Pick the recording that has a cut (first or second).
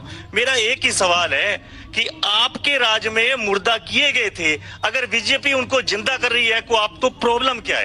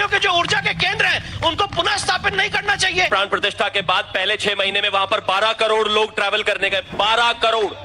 second